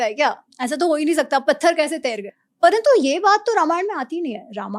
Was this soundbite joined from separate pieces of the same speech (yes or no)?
yes